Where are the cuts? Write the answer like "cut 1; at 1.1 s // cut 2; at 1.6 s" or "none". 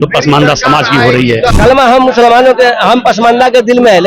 cut 1; at 1.5 s